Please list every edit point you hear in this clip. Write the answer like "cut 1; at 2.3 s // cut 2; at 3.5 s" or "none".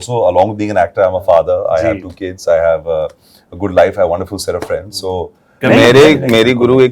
cut 1; at 5.6 s